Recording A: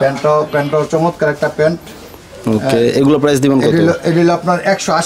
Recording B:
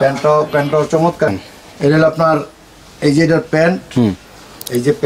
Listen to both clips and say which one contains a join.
B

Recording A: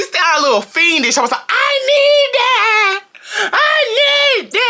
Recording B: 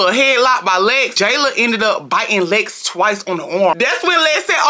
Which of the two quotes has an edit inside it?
B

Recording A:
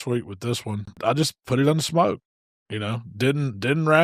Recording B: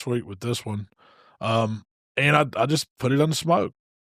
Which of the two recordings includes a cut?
A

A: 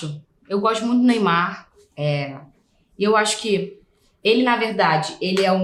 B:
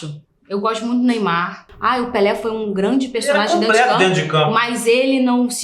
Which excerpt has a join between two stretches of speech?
B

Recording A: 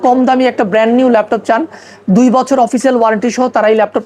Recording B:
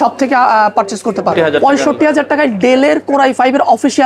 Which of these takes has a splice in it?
B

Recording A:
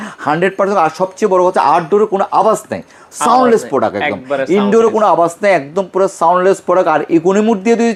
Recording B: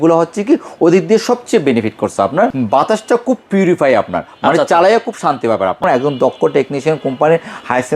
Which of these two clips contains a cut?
B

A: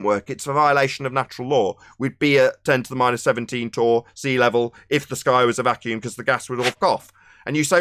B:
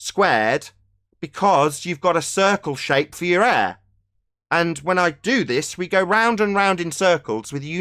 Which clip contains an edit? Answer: A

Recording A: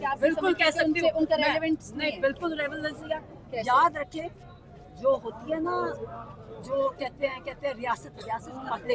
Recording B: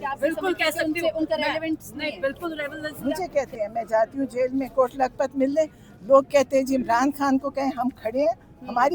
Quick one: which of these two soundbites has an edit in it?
B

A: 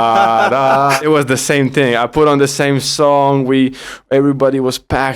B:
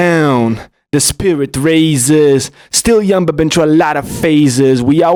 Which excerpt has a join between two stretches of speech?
A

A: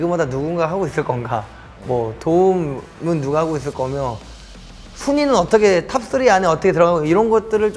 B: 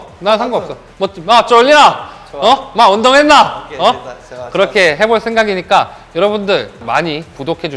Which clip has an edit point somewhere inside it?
B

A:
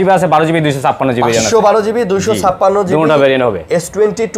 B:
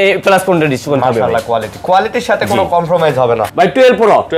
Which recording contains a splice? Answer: B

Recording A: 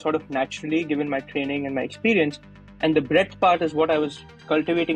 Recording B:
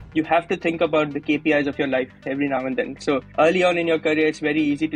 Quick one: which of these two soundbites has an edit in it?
B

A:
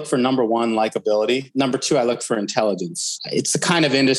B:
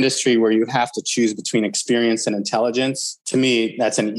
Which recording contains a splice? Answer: B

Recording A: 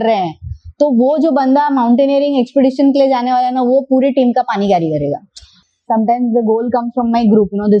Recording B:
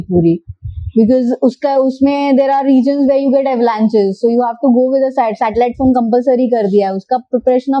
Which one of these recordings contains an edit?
A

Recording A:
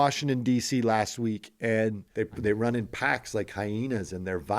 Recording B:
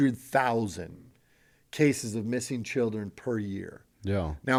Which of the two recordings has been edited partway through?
A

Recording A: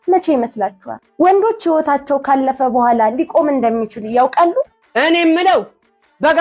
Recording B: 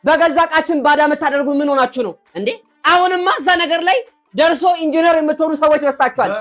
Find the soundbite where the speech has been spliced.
A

